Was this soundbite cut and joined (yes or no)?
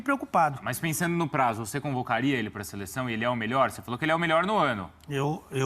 yes